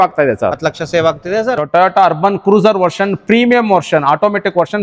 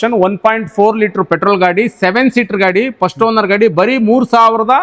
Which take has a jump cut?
first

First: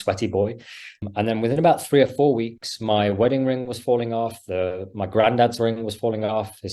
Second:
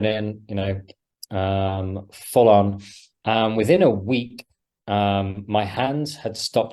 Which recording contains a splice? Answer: first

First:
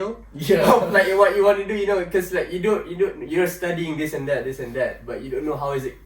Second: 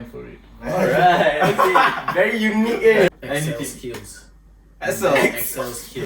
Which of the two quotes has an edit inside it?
second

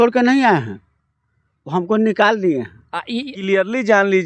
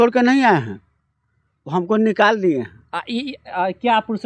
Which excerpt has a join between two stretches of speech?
first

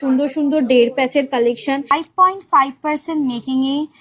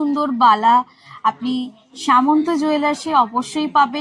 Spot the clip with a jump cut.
first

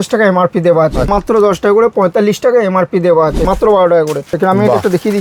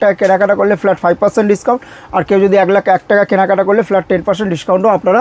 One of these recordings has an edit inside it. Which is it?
first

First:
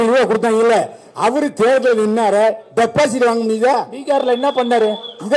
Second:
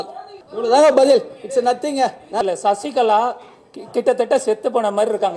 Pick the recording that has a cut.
second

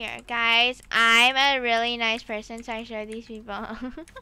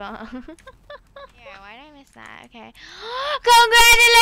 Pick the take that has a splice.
second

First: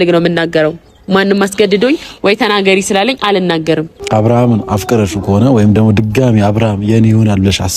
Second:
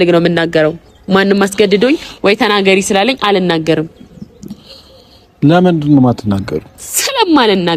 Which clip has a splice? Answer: first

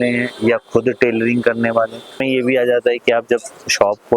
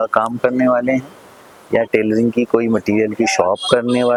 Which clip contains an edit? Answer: first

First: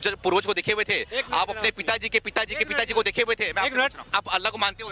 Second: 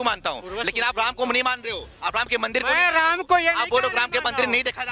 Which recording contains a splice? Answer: first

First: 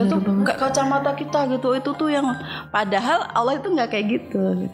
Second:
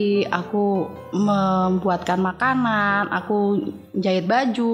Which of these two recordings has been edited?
second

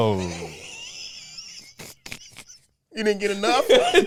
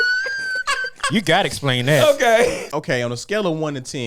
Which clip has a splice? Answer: second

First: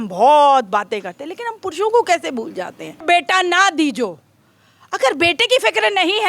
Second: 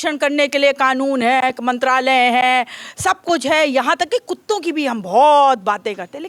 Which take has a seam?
first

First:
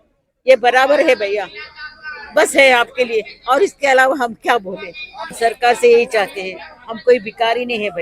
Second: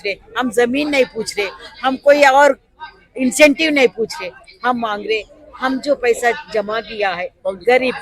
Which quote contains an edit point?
first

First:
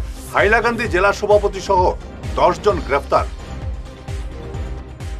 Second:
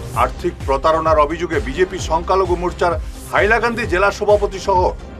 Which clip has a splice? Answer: first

